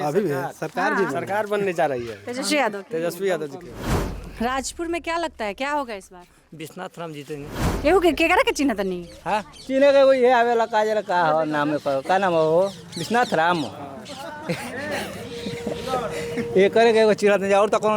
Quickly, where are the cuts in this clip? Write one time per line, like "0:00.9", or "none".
0:04.0
0:07.6